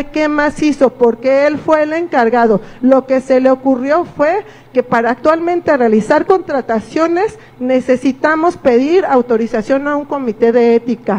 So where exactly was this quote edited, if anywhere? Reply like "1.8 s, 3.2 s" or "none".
none